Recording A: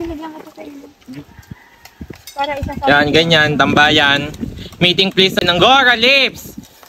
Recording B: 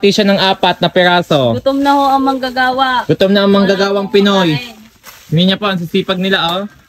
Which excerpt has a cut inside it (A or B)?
A